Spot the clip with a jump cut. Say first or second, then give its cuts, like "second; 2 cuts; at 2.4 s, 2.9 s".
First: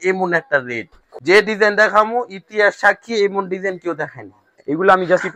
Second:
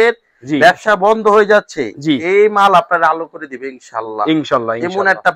first; 2 cuts; at 1.1 s, 4.5 s